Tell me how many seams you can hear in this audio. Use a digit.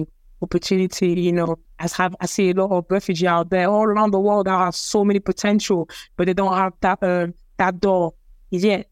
1